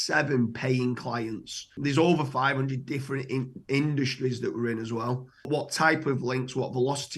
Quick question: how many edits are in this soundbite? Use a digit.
2